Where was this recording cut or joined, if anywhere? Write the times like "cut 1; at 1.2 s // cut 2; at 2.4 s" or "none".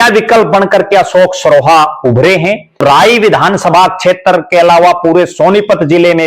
cut 1; at 2.8 s